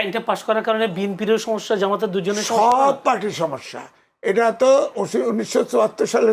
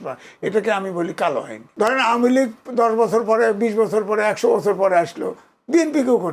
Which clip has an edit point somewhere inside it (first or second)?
second